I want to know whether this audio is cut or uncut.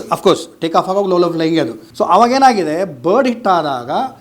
cut